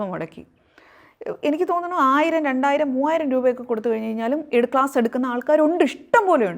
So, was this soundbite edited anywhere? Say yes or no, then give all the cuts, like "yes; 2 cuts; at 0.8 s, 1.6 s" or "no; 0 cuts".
no; 0 cuts